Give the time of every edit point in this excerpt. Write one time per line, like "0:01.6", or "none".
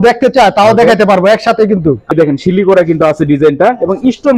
0:02.1